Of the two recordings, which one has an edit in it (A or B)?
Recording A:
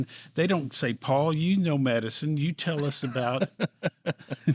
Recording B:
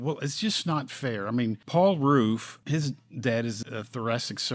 B